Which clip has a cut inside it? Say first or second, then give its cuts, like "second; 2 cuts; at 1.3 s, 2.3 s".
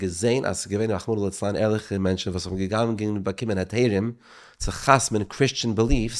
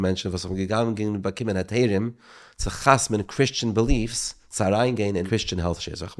second; 1 cut; at 5.3 s